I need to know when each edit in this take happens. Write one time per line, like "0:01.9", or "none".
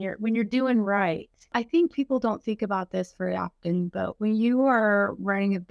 0:01.5